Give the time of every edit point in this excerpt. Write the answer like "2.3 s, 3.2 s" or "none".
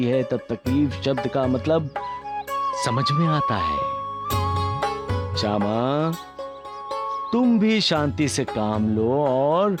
none

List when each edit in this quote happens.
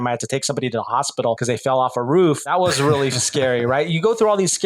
1.4 s, 2.5 s

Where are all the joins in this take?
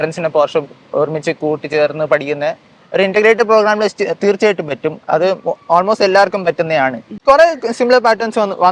7.1 s

